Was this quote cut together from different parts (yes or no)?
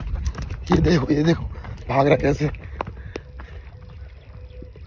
no